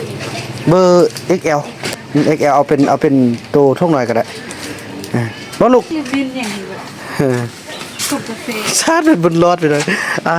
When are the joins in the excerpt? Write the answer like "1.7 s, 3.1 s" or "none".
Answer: 5.9 s